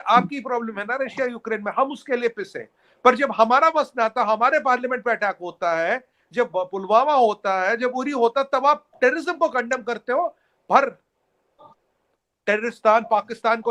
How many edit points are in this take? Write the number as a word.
zero